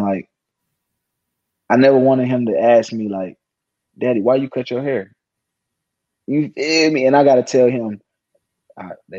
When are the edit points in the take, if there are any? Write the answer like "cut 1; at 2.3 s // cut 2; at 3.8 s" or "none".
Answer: none